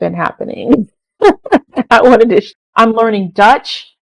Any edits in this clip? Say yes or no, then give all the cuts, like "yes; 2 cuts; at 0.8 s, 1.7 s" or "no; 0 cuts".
yes; 1 cut; at 2.6 s